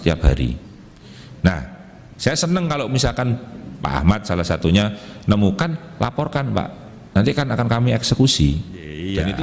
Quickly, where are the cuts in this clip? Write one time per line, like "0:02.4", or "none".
none